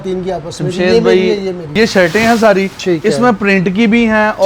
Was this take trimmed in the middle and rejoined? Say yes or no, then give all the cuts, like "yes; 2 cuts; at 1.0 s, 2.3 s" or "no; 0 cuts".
yes; 1 cut; at 1.7 s